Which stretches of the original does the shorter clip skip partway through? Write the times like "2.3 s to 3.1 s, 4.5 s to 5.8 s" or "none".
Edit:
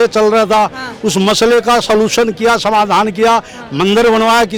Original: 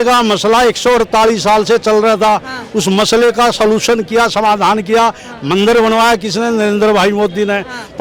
none